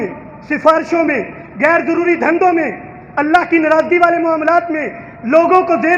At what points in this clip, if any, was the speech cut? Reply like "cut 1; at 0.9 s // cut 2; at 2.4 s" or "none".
none